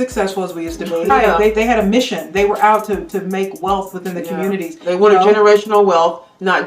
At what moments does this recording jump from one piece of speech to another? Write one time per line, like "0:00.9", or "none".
0:01.1